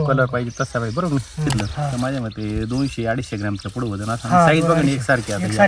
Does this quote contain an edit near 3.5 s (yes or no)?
no